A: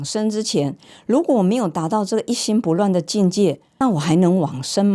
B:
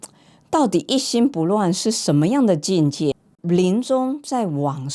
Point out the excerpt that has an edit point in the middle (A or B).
B